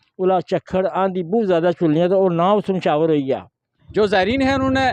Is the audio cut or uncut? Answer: cut